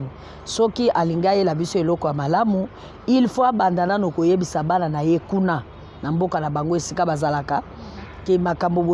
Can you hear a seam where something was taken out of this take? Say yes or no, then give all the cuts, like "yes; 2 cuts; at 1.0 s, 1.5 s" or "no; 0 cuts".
no; 0 cuts